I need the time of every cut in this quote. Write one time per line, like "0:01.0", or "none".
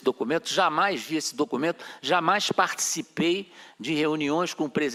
none

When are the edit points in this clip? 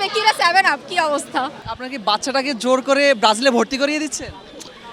0:01.6

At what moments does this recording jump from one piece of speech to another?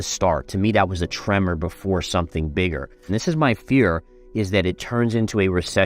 0:03.1

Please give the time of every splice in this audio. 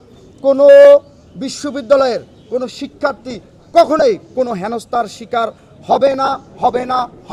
none

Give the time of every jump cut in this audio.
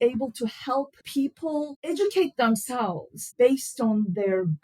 0:01.3
0:03.3

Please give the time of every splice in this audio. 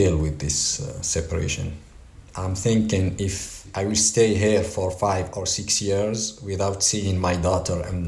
0:02.3
0:03.6

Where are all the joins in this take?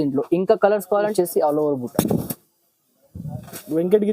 0:01.1

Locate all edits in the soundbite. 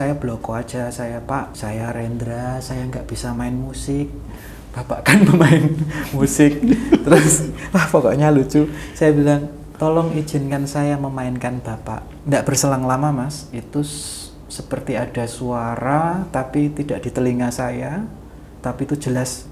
0:01.5
0:12.1

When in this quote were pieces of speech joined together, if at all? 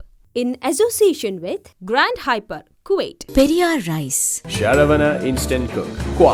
none

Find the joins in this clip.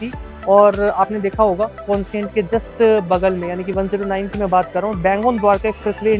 none

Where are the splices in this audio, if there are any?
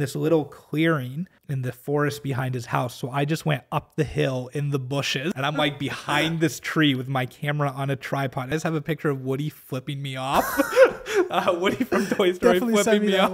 0:01.4
0:05.4
0:08.5

